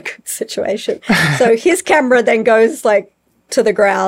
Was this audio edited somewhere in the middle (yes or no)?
no